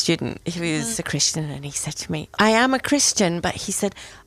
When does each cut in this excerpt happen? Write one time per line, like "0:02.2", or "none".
0:00.9
0:02.3